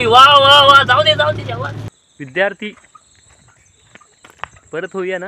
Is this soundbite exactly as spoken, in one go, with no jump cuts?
no; 1 cut; at 1.9 s

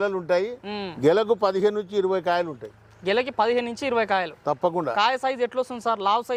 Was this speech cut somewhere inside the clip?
no; 0 cuts

